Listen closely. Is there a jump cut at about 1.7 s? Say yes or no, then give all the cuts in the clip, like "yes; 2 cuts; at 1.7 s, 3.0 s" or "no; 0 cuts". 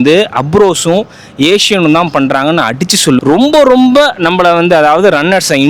no; 1 cut; at 3.2 s